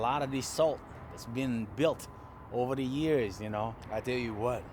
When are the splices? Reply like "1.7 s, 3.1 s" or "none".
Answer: 3.8 s